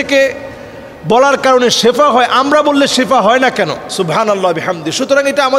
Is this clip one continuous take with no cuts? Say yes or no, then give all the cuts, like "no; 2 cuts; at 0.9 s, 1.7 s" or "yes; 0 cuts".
no; 1 cut; at 3.9 s